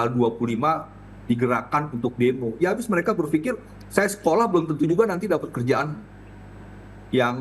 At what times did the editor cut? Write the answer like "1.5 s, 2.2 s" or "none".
none